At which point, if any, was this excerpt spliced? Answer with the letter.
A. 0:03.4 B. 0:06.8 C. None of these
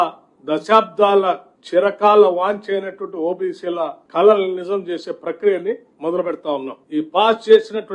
B